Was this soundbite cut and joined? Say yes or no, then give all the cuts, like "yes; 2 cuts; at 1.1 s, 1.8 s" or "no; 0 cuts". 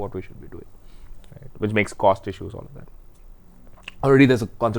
no; 0 cuts